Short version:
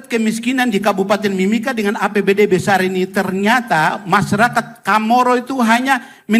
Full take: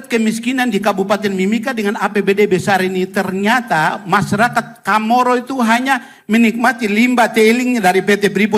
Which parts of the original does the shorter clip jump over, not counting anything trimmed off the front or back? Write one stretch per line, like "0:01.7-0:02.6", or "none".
none